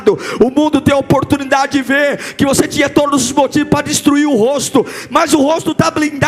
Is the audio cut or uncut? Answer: uncut